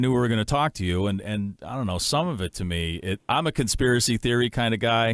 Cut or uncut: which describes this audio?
uncut